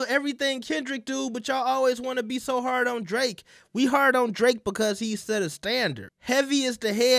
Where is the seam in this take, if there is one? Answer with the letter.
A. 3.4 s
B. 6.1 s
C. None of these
B